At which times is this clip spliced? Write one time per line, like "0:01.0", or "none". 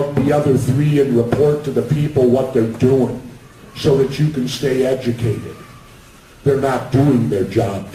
none